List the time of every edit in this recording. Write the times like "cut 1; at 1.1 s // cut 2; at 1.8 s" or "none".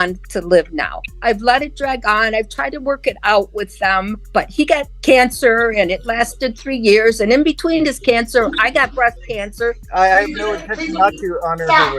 cut 1; at 1.1 s // cut 2; at 4.7 s // cut 3; at 9.8 s